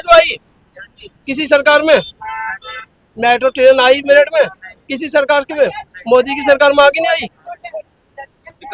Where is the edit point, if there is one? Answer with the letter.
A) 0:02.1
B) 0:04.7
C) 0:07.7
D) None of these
D